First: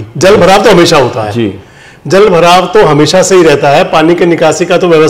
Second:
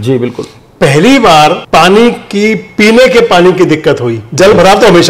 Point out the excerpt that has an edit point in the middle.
second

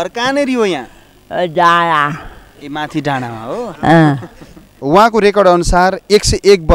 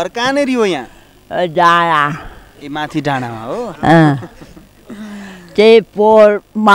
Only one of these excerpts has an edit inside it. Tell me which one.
first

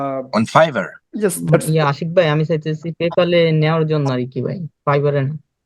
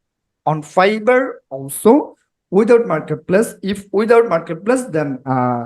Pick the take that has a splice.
first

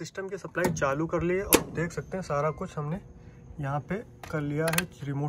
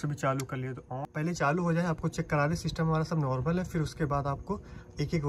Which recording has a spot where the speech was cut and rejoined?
second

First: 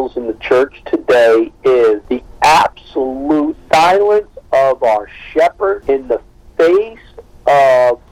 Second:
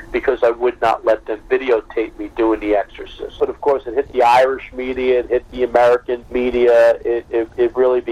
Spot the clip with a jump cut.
second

